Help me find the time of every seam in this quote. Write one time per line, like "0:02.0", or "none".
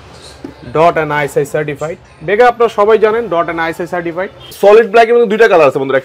0:04.5